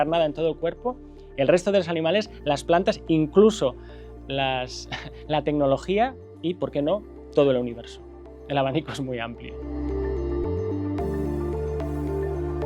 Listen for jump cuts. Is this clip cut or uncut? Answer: uncut